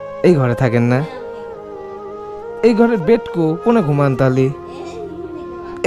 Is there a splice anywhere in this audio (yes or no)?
yes